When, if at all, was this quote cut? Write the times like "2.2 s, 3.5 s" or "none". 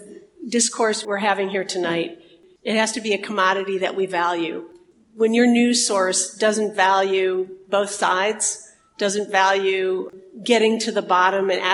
1.0 s, 2.3 s